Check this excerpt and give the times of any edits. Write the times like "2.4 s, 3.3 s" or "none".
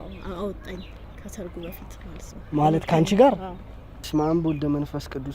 4.0 s

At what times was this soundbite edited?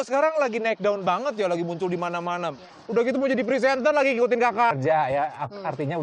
2.7 s, 4.8 s

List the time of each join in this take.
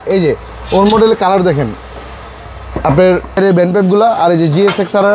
3.4 s

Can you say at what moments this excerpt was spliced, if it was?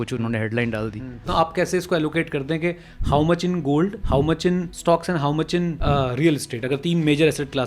1.3 s, 4.4 s, 5.8 s

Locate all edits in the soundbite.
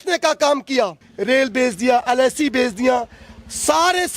1.1 s

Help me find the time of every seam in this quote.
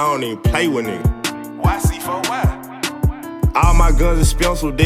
none

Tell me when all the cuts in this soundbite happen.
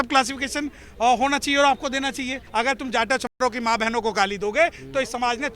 2.4 s

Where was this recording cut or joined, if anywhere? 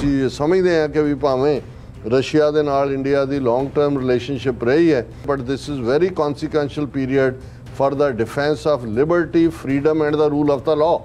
5.3 s

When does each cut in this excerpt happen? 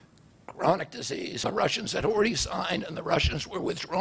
1.4 s

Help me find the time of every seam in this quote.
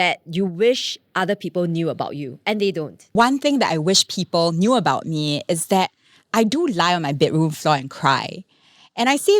3.1 s

